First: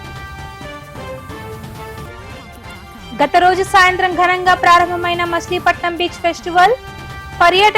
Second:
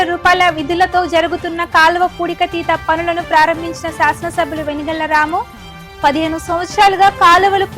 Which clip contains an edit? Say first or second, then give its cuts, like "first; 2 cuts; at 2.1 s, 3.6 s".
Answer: first; 1 cut; at 1.0 s